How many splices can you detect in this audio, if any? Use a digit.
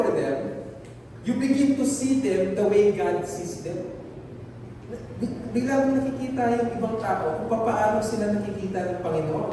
0